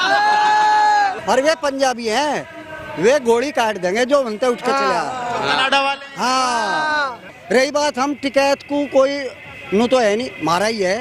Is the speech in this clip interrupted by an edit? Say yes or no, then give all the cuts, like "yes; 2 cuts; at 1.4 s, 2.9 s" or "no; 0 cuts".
yes; 2 cuts; at 1.2 s, 7.3 s